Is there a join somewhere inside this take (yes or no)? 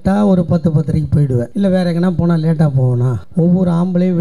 yes